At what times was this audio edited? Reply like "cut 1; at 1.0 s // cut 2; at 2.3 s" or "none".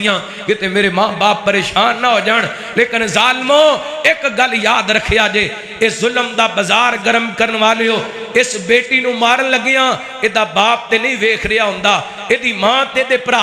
none